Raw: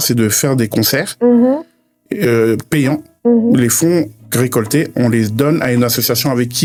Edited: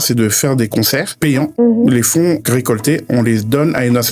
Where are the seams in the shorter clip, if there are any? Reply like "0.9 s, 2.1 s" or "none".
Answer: 1.2 s, 2.4 s